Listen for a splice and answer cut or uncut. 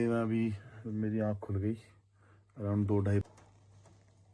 cut